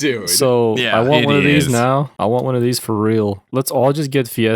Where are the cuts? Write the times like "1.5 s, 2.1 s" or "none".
3.4 s